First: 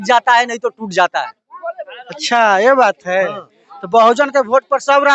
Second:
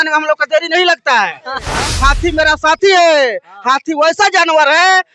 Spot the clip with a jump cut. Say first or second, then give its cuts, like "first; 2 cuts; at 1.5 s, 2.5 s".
second; 1 cut; at 1.7 s